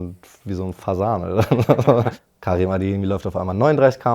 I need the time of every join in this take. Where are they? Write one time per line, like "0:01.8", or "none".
0:02.1